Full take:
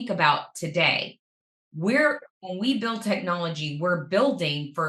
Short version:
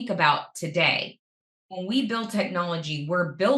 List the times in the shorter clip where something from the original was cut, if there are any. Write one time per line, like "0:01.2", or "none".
0:01.6